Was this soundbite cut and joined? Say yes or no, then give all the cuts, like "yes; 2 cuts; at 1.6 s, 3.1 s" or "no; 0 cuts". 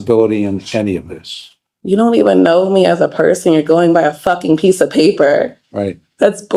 no; 0 cuts